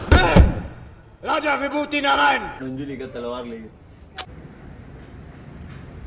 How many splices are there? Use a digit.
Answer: 1